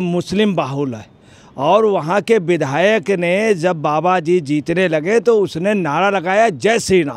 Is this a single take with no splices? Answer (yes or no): yes